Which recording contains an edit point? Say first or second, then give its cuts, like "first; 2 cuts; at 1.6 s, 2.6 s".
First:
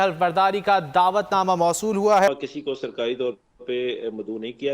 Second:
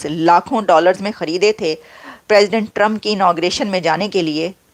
first; 1 cut; at 2.3 s